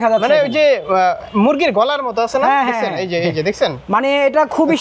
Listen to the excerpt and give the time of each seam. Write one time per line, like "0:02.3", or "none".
none